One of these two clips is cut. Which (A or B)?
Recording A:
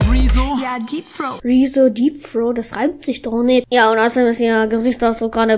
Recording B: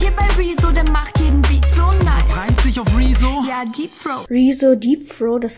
A